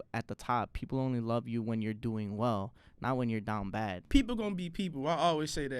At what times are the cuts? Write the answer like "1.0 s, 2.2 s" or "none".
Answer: 4.0 s